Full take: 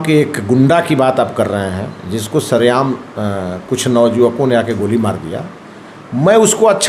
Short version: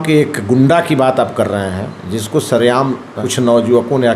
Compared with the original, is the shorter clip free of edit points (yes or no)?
no